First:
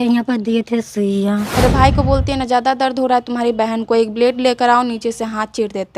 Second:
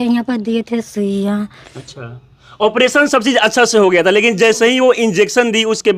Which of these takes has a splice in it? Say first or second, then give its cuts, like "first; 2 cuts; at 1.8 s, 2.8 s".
first; 1 cut; at 1.6 s